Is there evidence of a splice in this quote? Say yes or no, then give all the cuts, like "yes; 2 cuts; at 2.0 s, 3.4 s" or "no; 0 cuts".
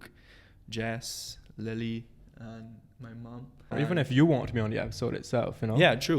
yes; 1 cut; at 3.6 s